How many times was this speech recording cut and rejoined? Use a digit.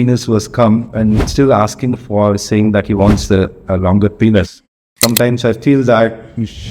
1